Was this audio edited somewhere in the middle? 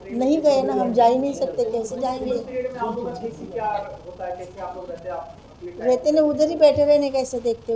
no; 0 cuts

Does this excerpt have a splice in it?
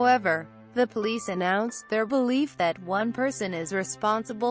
yes; 1 cut; at 1.6 s

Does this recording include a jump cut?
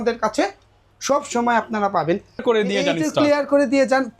yes; 1 cut; at 2.4 s

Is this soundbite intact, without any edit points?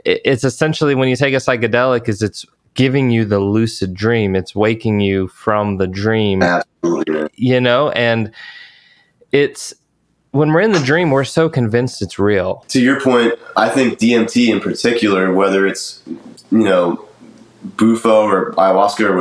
no; 1 cut; at 12.6 s

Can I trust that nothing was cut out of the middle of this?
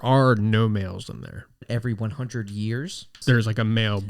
no; 2 cuts; at 1.7 s, 3.1 s

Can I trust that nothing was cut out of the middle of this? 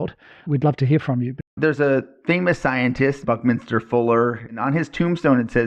no; 3 cuts; at 1.6 s, 3.2 s, 4.6 s

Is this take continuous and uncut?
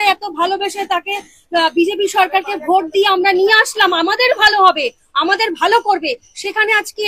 yes; 0 cuts

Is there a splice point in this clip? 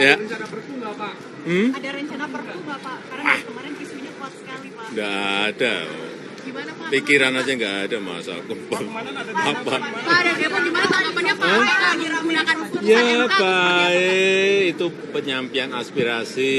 no; 0 cuts

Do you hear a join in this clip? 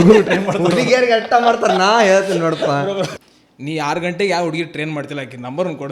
yes; 1 cut; at 3.2 s

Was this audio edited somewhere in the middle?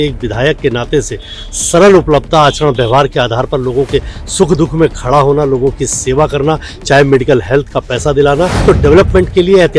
yes; 1 cut; at 8.6 s

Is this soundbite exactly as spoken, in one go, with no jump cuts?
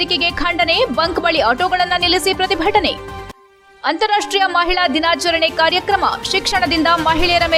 yes; 0 cuts

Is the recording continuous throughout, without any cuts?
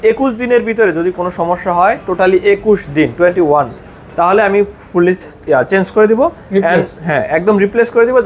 yes; 0 cuts

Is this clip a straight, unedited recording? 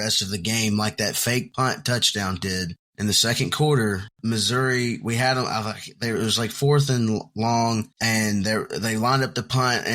no; 4 cuts; at 1.5 s, 2.8 s, 4.1 s, 7.9 s

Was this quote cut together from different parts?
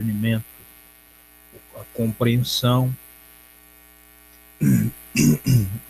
yes; 1 cut; at 2.8 s

